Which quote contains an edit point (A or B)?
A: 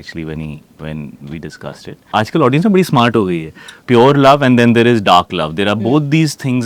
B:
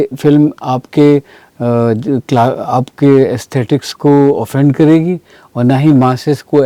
A